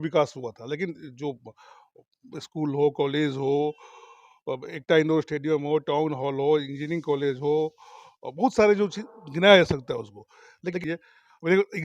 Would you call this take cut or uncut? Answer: cut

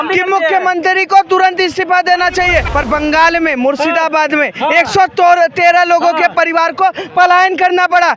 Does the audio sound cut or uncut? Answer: cut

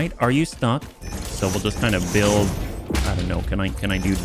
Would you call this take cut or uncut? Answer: cut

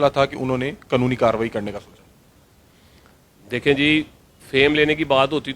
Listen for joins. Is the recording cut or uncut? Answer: uncut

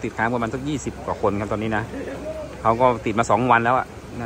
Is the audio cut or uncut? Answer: uncut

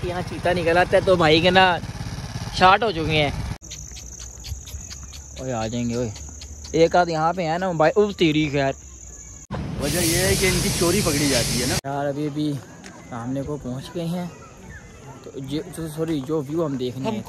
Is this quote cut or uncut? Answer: cut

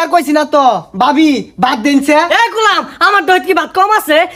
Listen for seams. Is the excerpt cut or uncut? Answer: uncut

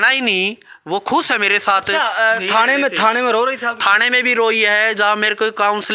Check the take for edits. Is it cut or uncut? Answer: uncut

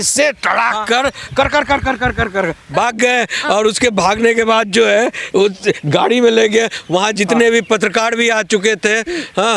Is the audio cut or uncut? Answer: uncut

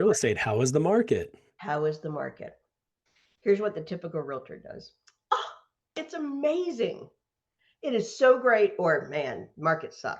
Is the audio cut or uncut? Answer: uncut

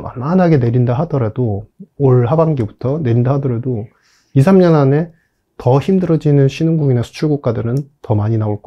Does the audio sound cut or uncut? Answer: uncut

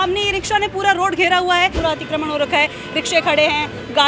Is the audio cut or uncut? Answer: cut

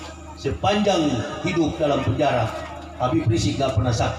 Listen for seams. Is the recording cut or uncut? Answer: uncut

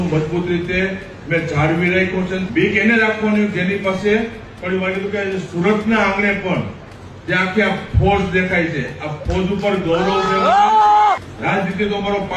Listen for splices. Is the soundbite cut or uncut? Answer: cut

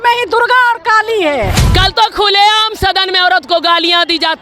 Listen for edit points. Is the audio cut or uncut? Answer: cut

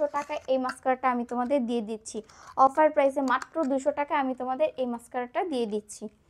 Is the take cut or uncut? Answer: uncut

